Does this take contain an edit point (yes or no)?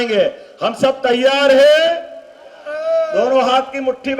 no